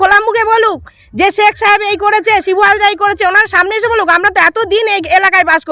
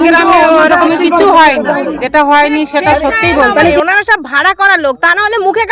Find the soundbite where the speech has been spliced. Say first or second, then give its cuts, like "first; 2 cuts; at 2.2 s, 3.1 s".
second; 2 cuts; at 2.0 s, 3.7 s